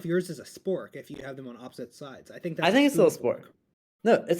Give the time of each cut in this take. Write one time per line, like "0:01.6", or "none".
0:02.6